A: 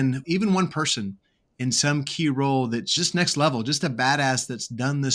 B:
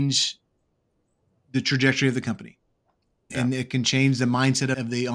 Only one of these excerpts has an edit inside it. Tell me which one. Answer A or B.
A